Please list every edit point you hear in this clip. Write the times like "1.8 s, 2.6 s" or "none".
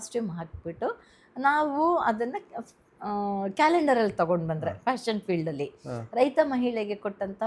none